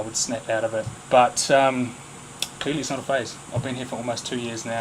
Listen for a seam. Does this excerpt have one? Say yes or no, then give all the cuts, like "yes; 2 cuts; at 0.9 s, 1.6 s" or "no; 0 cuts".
no; 0 cuts